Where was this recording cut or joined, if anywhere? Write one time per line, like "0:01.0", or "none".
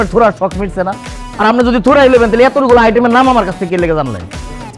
none